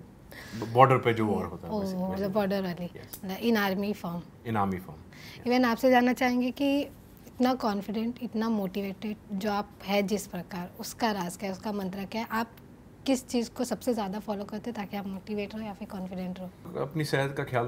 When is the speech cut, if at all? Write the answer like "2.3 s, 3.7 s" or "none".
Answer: none